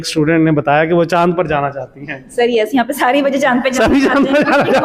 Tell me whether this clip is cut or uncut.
uncut